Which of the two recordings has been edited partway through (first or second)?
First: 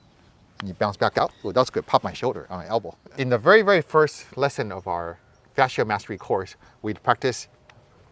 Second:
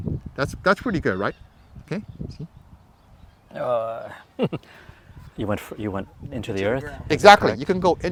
first